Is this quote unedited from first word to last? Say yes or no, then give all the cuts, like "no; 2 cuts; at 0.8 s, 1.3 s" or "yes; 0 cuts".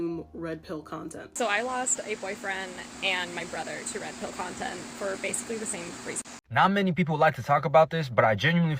no; 2 cuts; at 1.3 s, 6.4 s